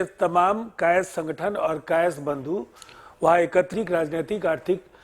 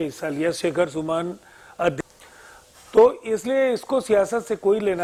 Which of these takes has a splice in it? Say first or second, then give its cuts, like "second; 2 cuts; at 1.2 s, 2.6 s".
first; 1 cut; at 3.7 s